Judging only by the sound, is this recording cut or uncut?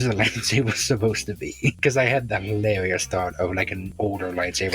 cut